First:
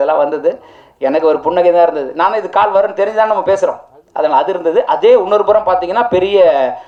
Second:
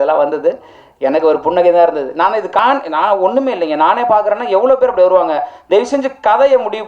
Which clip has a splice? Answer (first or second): second